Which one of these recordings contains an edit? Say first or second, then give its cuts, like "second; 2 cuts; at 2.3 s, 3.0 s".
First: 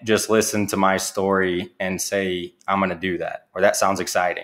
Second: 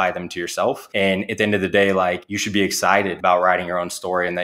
second; 3 cuts; at 0.8 s, 2.3 s, 3.1 s